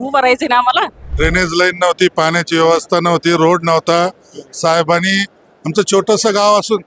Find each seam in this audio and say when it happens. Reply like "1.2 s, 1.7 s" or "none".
1.1 s